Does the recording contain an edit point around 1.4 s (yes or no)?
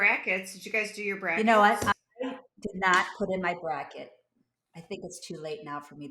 yes